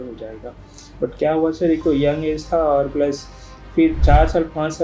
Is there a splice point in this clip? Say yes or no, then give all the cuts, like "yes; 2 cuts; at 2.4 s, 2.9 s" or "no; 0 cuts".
no; 0 cuts